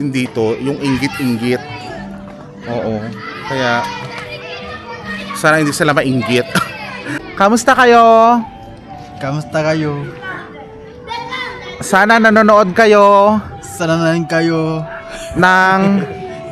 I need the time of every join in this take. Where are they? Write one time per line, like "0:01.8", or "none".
0:07.2